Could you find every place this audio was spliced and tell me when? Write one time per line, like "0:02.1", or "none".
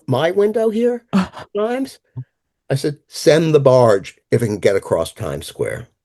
none